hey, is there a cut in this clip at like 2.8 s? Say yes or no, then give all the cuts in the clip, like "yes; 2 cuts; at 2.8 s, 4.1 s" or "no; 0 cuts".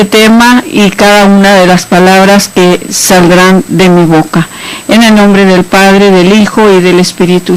yes; 1 cut; at 2.8 s